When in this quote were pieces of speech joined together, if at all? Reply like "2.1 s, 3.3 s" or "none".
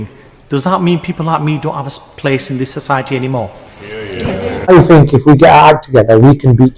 4.7 s